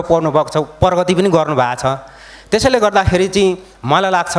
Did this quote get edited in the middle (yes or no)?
no